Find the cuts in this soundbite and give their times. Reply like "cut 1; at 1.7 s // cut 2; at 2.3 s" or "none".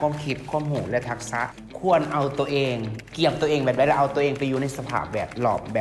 none

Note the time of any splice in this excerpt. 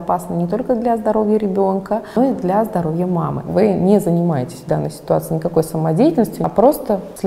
cut 1; at 2.1 s // cut 2; at 3.4 s // cut 3; at 6.4 s

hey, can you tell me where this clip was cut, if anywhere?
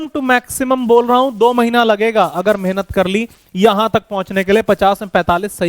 none

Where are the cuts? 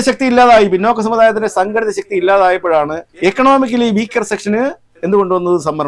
cut 1; at 3.0 s

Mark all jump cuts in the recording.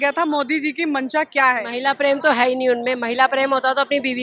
cut 1; at 1.7 s

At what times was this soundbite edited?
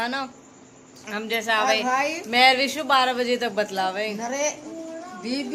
none

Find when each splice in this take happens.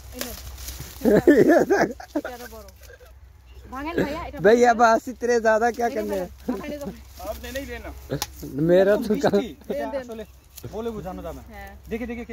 none

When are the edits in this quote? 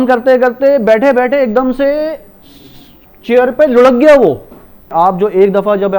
cut 1; at 4.9 s

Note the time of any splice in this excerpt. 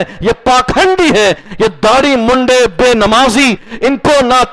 none

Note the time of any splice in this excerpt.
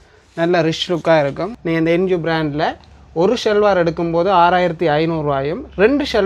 cut 1; at 1.6 s

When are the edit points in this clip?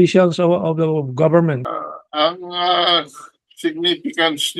cut 1; at 1.6 s

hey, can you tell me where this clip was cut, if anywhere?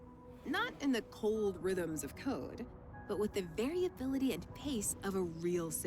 cut 1; at 3.8 s

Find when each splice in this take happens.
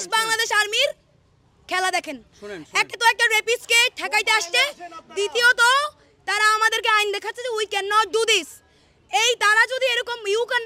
none

